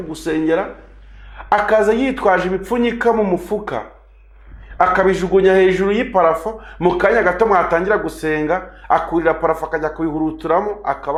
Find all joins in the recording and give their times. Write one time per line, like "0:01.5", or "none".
none